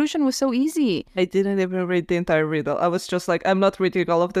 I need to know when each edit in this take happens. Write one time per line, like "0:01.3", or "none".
0:01.1